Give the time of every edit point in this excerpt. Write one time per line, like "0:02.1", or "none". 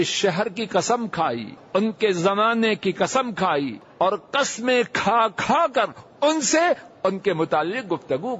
0:01.5
0:03.8